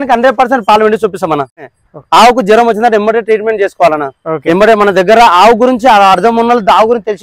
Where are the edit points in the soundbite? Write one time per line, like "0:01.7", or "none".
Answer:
0:01.6